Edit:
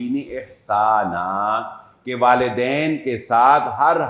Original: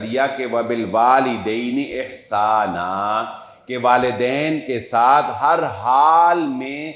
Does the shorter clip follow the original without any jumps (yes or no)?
yes